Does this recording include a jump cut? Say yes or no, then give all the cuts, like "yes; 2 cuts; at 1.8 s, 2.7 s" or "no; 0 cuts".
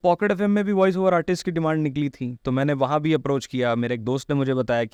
no; 0 cuts